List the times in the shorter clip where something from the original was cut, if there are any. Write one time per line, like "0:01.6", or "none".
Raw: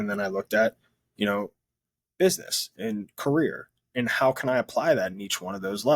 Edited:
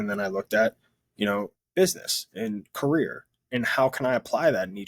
0:01.6

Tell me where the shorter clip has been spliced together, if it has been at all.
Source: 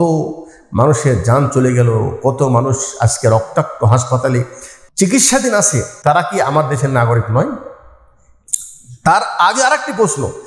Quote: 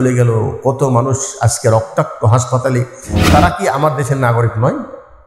0:03.2

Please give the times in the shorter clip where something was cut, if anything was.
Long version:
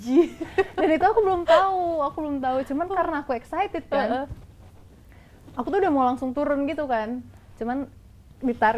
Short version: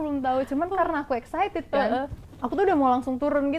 0:02.2

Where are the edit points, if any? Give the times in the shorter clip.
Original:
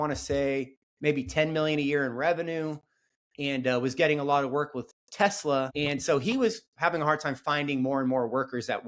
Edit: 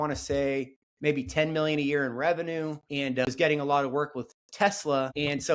0:03.3

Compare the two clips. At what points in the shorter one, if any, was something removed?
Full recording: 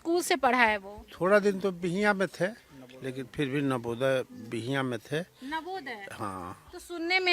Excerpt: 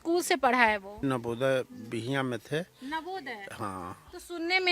0:01.0

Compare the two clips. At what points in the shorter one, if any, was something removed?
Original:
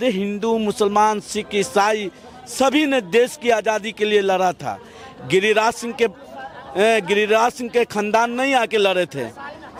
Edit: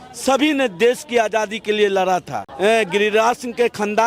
0:02.4

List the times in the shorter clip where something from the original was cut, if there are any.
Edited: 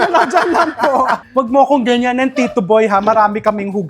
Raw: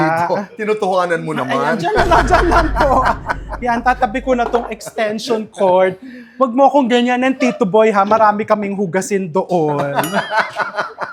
0:01.2

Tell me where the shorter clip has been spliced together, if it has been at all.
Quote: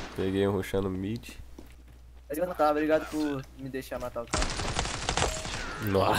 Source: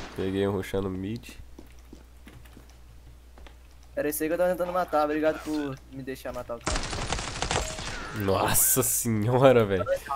0:02.5

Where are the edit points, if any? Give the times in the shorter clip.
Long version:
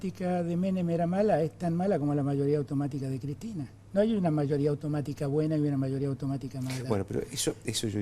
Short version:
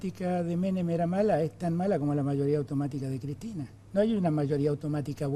none

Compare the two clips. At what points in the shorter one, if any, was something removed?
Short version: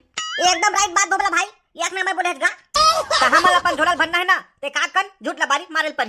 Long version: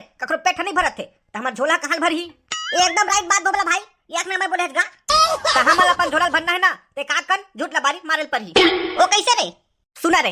none

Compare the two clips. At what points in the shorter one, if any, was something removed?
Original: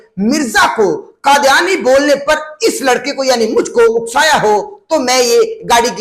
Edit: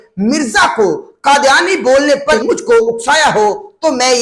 0:02.4

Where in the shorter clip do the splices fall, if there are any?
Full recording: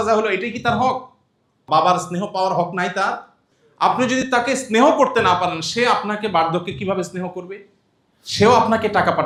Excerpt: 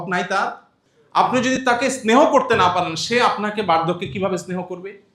none

